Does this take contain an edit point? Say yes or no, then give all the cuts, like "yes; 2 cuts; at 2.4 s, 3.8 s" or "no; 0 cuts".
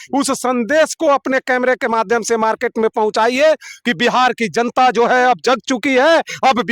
no; 0 cuts